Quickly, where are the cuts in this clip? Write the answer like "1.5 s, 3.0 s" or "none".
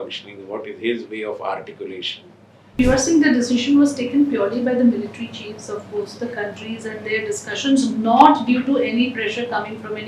2.8 s